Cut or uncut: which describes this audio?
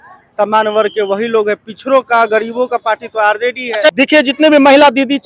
cut